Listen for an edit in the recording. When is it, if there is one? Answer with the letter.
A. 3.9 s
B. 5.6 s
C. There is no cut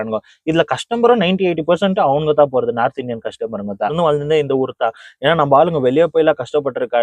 A